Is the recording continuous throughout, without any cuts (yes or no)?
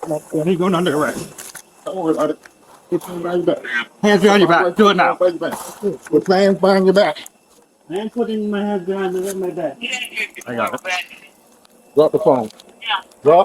yes